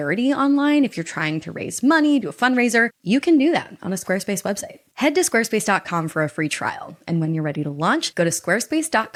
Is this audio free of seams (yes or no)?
yes